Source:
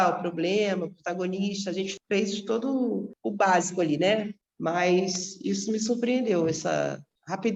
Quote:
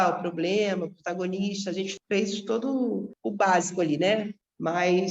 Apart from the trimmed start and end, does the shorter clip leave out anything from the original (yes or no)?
no